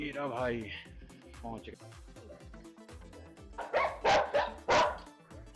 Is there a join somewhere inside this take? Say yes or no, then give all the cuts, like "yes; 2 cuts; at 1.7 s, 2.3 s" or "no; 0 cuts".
yes; 1 cut; at 1.7 s